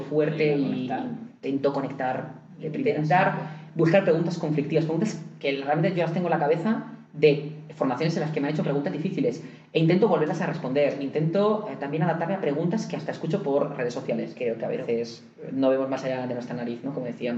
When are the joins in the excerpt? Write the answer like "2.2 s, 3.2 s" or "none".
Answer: 2.8 s, 14.3 s